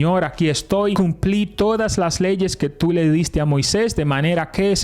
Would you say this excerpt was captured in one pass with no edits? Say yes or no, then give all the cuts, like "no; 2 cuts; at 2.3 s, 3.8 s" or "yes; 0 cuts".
no; 1 cut; at 0.9 s